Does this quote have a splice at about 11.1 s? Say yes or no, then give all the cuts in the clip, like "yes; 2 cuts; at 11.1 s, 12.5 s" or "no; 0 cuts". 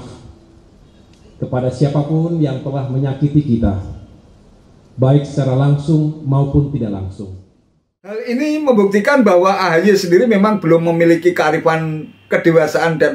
no; 1 cut; at 8.2 s